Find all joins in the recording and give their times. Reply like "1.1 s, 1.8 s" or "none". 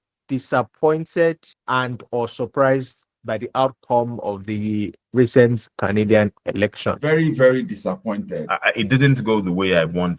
1.1 s, 7.0 s, 8.5 s